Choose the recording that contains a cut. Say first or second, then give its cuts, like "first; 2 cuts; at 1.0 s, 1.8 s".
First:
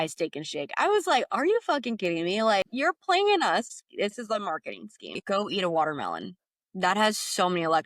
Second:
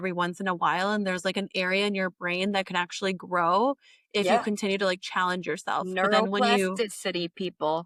first; 2 cuts; at 2.7 s, 5.1 s